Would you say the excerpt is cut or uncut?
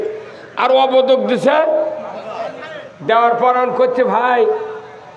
uncut